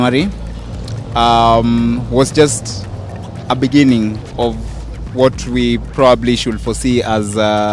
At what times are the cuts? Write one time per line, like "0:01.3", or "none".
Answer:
none